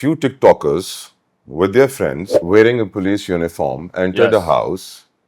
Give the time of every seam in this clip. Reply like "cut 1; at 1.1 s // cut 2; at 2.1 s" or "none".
cut 1; at 2.3 s